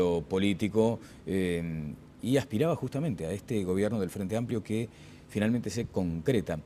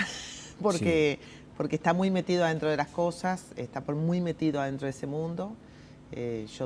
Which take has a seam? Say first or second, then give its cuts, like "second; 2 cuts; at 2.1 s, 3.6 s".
second; 1 cut; at 2.9 s